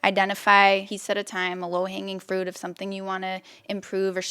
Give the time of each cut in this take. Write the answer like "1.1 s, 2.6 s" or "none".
0.9 s